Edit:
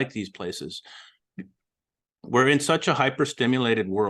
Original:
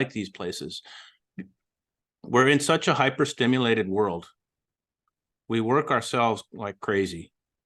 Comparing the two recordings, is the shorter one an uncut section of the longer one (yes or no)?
yes